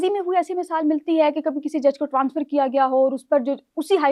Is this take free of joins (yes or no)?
yes